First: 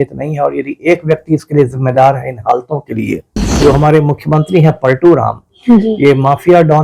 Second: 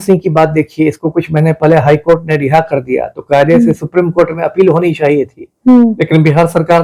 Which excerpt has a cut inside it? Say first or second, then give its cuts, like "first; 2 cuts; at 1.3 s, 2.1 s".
first; 1 cut; at 3.4 s